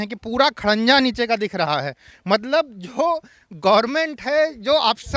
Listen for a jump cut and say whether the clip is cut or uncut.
uncut